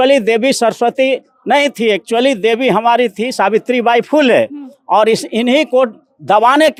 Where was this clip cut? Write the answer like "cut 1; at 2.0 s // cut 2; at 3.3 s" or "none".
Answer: none